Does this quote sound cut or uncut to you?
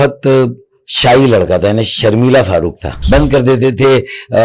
cut